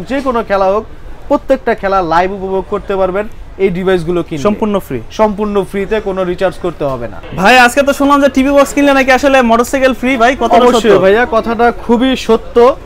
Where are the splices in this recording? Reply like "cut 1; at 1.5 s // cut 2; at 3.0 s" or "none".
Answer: none